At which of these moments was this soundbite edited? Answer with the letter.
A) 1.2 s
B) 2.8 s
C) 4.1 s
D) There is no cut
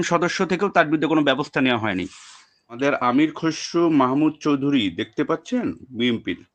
B